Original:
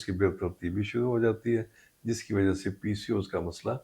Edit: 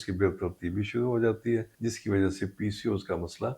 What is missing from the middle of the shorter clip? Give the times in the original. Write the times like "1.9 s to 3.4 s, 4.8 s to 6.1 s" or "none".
1.7 s to 2.0 s